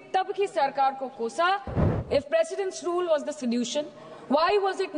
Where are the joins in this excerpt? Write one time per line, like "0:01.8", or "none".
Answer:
0:01.8